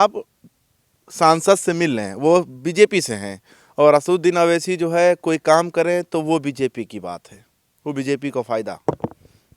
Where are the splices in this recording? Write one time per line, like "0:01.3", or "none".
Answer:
none